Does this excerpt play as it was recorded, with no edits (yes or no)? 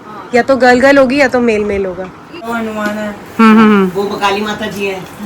no